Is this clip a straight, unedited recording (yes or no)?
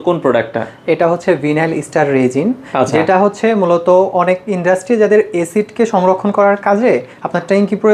yes